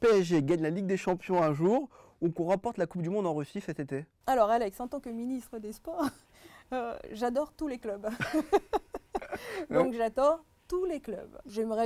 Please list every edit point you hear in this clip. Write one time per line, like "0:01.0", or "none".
0:04.1